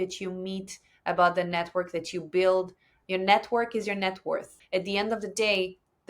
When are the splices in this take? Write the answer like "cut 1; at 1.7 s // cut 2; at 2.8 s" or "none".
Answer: cut 1; at 4.6 s